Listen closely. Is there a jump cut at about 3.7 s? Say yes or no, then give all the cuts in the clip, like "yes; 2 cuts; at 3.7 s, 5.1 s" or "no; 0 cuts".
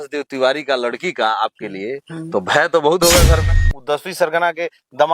yes; 1 cut; at 3.7 s